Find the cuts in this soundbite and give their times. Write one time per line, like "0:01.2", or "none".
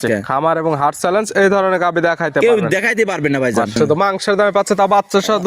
0:03.7